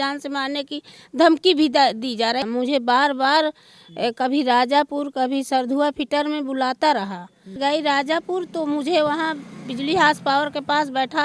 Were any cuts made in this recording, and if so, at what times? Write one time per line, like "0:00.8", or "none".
0:02.4
0:07.6

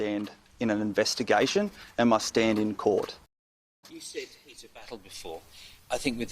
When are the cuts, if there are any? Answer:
0:03.6

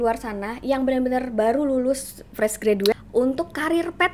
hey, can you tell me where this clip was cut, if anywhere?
0:02.9

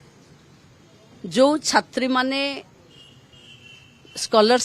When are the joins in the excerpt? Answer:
none

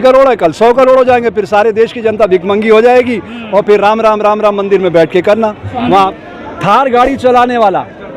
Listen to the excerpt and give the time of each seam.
0:06.1

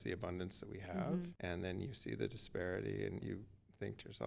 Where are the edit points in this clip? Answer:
0:01.3
0:03.2

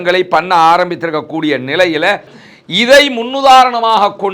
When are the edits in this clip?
0:02.4

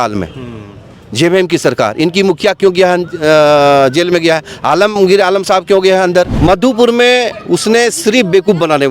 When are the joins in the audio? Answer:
0:06.3

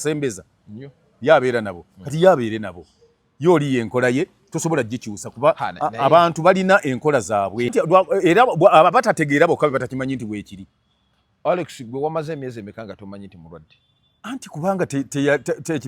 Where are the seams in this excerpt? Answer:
0:07.7

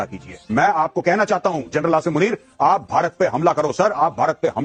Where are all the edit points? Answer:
none

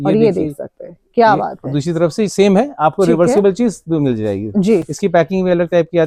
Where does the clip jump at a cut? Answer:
none

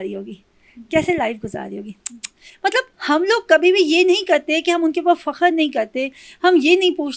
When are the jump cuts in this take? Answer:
none

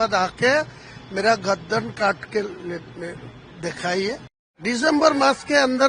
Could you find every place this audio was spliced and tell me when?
0:04.5

